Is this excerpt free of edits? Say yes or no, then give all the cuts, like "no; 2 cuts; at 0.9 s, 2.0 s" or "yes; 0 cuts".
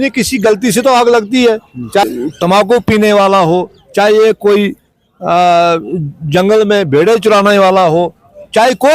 no; 1 cut; at 2.0 s